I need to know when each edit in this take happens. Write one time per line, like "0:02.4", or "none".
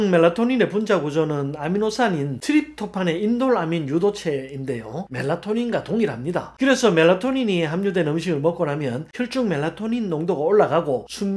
none